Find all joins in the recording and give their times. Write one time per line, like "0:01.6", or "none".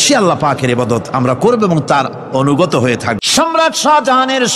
0:03.2